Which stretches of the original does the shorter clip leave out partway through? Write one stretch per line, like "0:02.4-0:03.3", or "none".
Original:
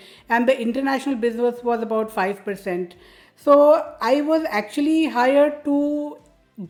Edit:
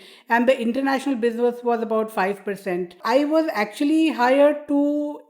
0:03.0-0:03.9